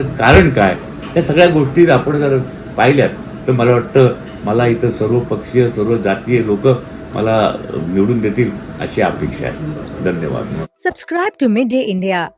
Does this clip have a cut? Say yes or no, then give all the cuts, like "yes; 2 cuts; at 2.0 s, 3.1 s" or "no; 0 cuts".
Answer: no; 0 cuts